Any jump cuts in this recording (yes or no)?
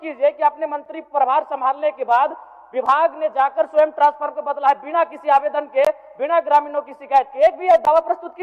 no